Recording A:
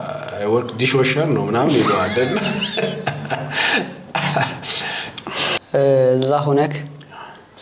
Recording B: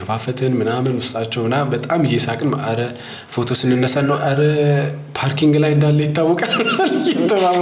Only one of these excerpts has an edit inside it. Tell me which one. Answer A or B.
A